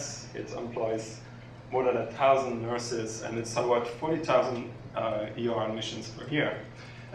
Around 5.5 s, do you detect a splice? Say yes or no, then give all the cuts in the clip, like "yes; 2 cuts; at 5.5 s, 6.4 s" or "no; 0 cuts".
no; 0 cuts